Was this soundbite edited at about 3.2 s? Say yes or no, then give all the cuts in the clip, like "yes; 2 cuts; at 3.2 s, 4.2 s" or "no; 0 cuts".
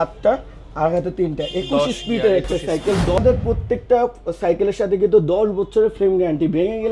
yes; 1 cut; at 3.2 s